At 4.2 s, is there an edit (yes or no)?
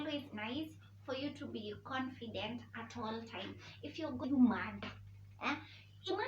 yes